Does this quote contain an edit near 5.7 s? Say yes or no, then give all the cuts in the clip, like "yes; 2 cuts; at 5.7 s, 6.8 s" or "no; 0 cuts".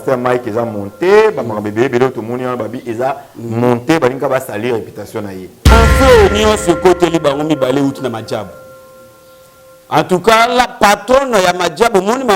yes; 1 cut; at 5.7 s